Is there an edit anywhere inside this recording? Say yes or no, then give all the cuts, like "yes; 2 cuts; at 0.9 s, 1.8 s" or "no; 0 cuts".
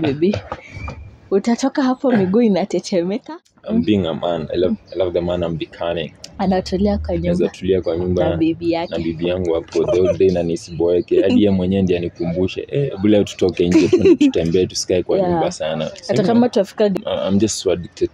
yes; 2 cuts; at 3.3 s, 17.0 s